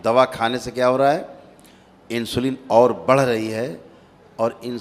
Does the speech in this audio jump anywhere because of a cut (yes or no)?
no